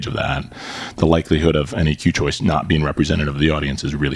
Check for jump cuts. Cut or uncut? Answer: uncut